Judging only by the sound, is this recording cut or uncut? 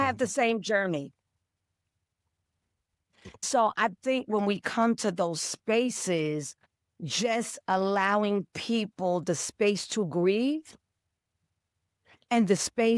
cut